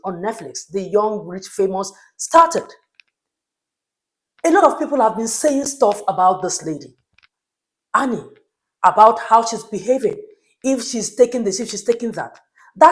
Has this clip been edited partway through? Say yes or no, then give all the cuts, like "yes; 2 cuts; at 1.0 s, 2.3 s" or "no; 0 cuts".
no; 0 cuts